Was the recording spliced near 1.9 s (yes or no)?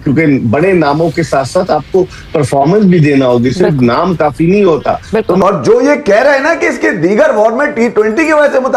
no